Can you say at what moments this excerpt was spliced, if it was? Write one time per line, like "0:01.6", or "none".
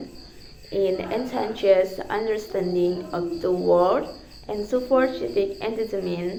none